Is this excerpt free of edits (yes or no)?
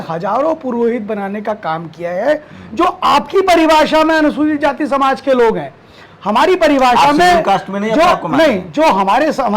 yes